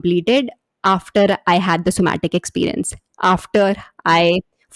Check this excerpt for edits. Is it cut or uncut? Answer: uncut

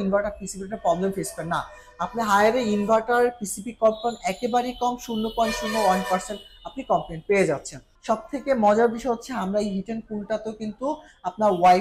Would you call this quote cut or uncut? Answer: cut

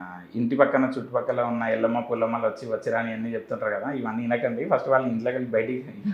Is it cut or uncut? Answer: uncut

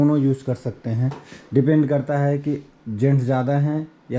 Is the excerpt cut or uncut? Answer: uncut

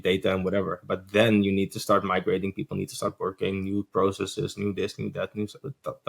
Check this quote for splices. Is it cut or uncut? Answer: uncut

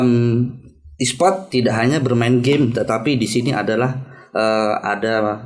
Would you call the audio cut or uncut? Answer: uncut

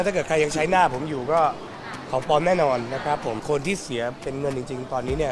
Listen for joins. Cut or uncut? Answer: cut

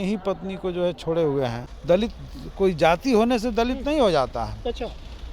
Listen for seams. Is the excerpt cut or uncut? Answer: cut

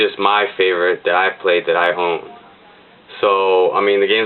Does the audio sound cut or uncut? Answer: uncut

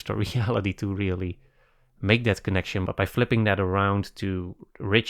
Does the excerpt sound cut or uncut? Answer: cut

